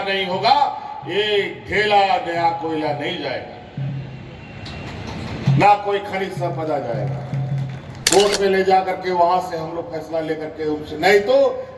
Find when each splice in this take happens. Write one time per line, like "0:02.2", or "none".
0:08.0

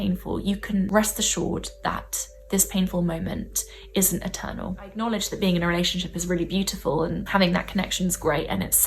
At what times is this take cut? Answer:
0:00.9
0:04.9
0:07.2

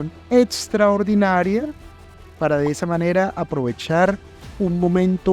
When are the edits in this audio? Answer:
none

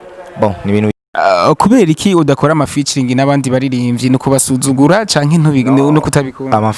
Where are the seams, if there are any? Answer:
0:00.9

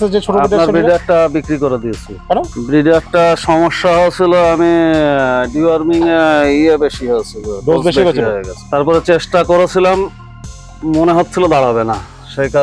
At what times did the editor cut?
none

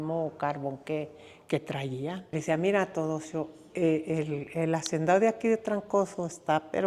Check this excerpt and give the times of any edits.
0:02.3

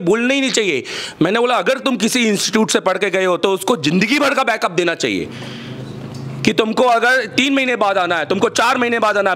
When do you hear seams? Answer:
none

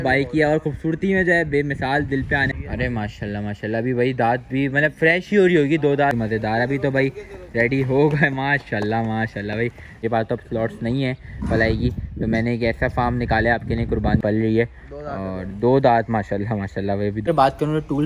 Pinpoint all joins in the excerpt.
0:02.5
0:06.1
0:10.0
0:14.2
0:17.3

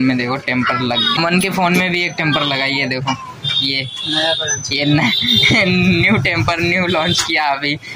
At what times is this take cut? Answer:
0:01.2

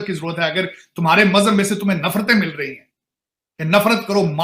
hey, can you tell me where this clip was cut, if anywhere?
none

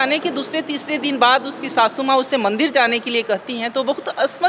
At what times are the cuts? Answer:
none

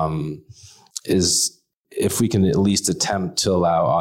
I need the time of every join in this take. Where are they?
0:01.7

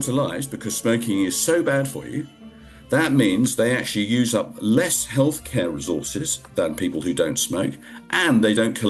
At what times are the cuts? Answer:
none

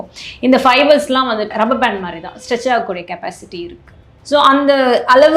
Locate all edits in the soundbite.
0:01.5

